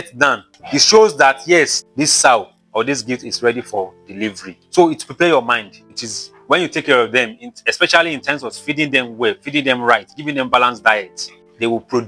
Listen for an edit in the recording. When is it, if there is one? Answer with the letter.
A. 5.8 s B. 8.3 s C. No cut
A